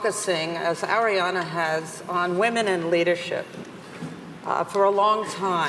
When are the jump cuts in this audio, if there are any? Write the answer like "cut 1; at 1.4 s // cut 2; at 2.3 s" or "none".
cut 1; at 1.2 s